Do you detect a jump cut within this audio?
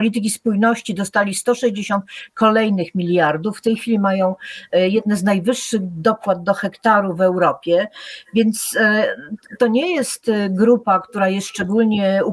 no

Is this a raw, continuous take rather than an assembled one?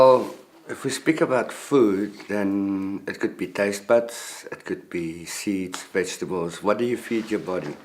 yes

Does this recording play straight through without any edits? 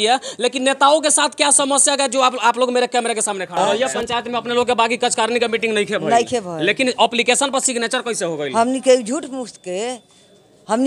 no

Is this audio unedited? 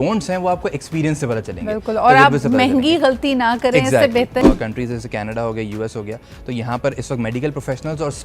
no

